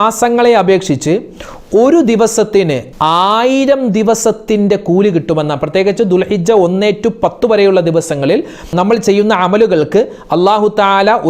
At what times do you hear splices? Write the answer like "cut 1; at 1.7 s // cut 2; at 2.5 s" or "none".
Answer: cut 1; at 2.8 s